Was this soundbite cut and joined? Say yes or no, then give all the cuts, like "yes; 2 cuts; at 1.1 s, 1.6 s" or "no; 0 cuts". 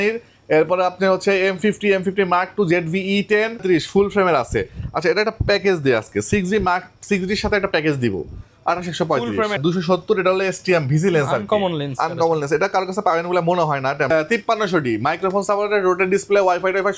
yes; 3 cuts; at 3.6 s, 9.6 s, 14.1 s